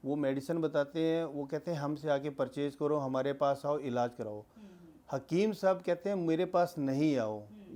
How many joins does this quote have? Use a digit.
0